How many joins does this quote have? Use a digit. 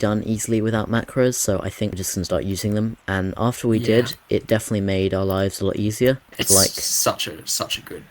2